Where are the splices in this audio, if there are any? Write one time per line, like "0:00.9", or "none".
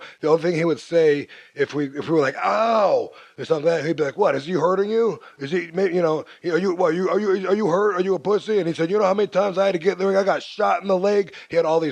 none